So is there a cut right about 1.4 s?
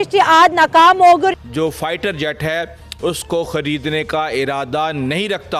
yes; 1 cut; at 1.4 s

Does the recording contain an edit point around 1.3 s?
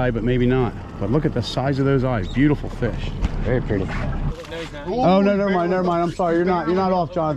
no; 1 cut; at 4.4 s

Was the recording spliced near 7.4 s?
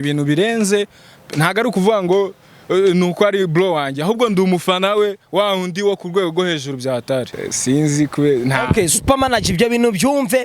yes; 1 cut; at 7.4 s

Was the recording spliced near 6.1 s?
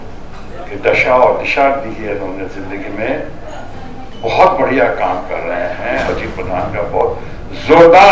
yes; 1 cut; at 6.1 s

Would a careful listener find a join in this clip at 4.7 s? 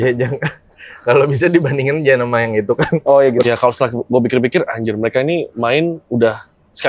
no; 1 cut; at 3.4 s

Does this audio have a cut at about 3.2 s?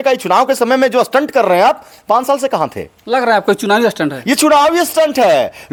no; 0 cuts

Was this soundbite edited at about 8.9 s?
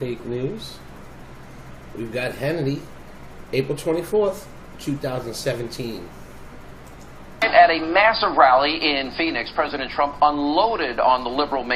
no; 0 cuts

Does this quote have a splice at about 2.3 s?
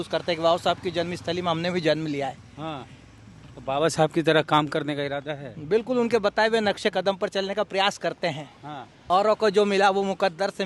no; 0 cuts

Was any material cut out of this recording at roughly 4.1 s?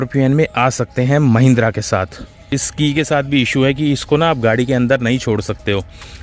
no; 1 cut; at 2.4 s

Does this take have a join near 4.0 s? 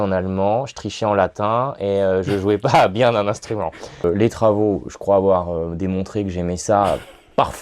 yes; 1 cut; at 4.0 s

